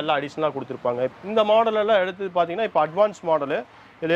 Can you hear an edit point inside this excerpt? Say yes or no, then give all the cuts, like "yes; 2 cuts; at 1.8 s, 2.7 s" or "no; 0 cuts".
yes; 1 cut; at 1.1 s